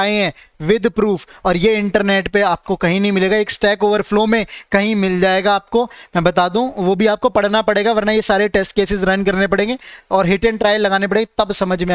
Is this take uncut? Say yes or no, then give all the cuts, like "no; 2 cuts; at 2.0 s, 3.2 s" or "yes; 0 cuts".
yes; 0 cuts